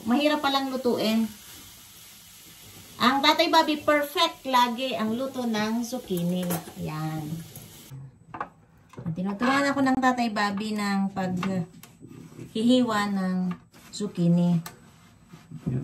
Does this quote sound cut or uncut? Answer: cut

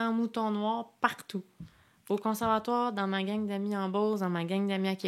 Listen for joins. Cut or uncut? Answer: uncut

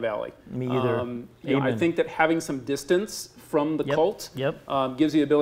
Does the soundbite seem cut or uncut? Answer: uncut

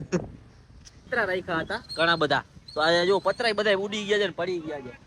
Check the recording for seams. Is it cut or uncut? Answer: cut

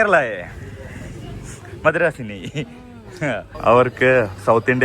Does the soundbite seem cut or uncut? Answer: cut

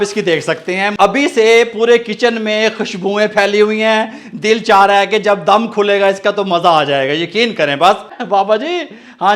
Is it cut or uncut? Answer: cut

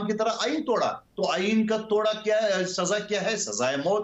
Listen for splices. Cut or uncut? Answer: uncut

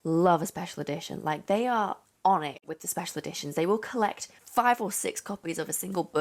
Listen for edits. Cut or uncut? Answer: uncut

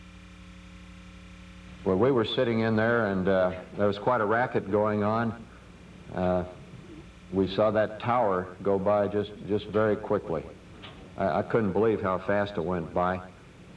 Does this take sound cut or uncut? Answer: cut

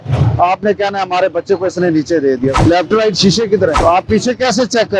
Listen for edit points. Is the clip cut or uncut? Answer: cut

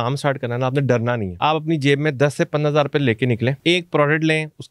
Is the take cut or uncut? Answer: cut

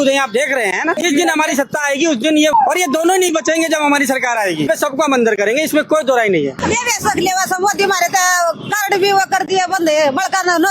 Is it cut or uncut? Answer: cut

